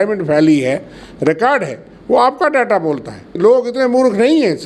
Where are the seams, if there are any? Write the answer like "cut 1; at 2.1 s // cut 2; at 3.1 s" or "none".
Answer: cut 1; at 3.3 s